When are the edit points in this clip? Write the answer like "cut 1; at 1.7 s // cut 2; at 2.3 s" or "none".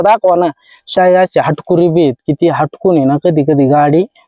cut 1; at 0.9 s